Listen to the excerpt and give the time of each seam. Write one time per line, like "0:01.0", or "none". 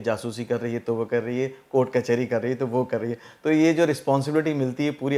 none

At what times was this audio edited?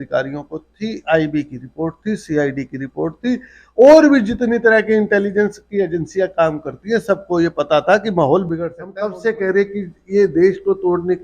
0:09.2

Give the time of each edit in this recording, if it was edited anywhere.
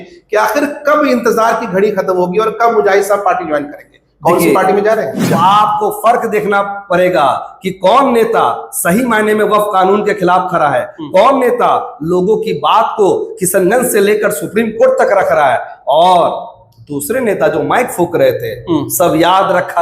0:05.4

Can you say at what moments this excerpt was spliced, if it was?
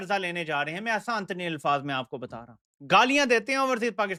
none

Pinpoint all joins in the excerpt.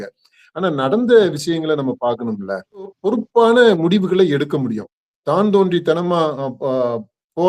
0:03.0

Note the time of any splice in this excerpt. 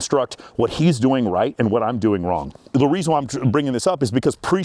0:02.7

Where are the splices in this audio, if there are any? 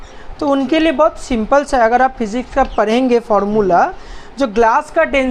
none

